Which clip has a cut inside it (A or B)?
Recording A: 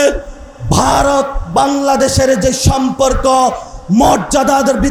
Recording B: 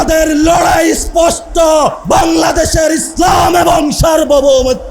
B